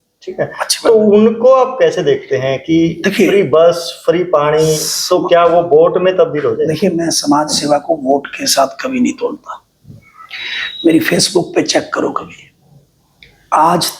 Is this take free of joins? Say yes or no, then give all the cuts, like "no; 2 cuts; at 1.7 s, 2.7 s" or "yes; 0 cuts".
yes; 0 cuts